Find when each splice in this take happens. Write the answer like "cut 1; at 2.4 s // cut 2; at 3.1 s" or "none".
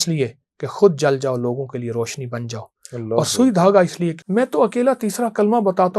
cut 1; at 4.2 s